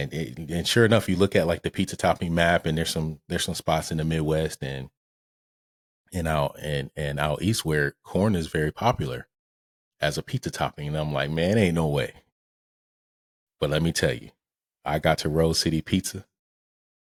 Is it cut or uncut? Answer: uncut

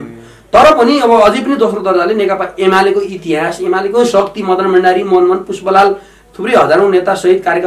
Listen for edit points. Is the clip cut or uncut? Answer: uncut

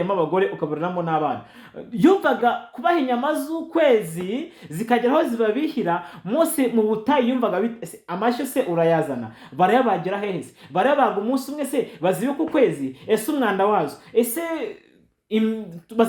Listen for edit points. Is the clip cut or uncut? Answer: uncut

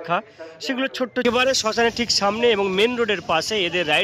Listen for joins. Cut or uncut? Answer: cut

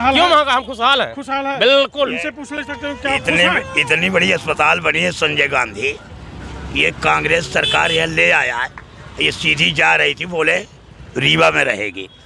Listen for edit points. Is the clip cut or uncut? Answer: uncut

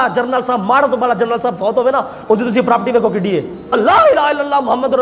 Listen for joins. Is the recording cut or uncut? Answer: cut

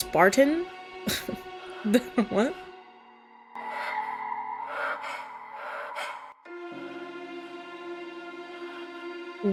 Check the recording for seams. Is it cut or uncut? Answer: uncut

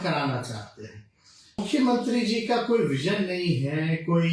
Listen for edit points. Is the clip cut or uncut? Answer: cut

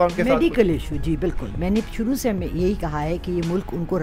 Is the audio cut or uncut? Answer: uncut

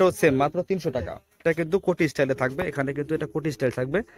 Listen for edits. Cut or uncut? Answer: cut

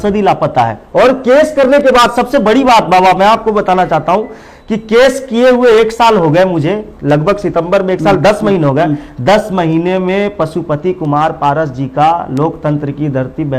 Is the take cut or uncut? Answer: uncut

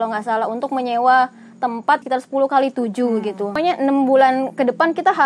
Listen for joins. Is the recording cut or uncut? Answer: cut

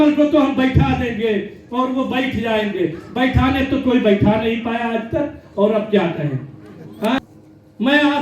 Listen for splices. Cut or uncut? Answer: cut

